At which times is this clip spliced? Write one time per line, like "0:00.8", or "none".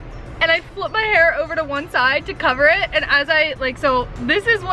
none